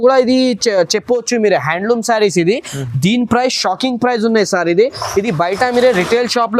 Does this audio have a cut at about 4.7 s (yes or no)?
no